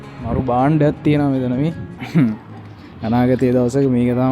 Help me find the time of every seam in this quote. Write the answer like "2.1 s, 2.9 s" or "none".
1.9 s

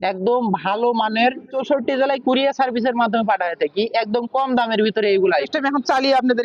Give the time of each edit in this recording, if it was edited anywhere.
1.6 s, 5.5 s

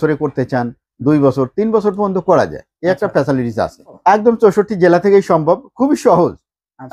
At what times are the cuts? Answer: 4.0 s

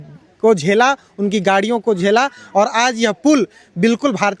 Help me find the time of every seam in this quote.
none

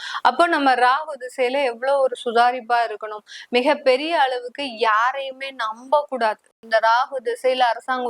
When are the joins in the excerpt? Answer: 6.5 s

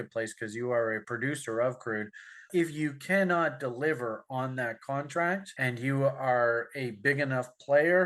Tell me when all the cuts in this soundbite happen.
2.4 s

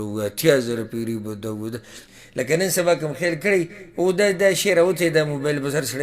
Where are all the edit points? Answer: 2.0 s

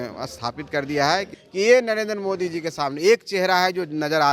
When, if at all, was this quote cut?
1.4 s

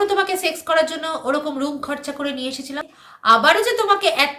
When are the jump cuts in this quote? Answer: 2.9 s

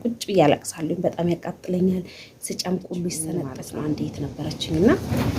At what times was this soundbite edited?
3.6 s

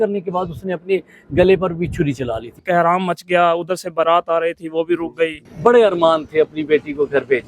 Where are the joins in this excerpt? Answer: 2.6 s, 5.4 s

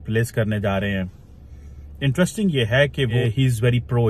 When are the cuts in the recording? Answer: 3.2 s

